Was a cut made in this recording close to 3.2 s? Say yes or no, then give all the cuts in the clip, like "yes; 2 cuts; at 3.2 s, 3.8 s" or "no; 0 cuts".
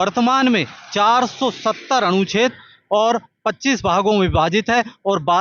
no; 0 cuts